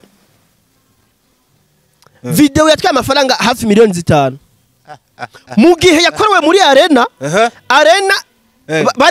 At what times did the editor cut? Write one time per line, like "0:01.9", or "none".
none